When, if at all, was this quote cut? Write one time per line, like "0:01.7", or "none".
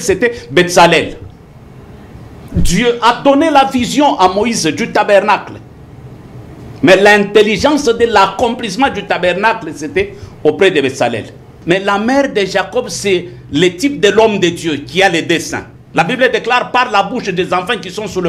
0:11.5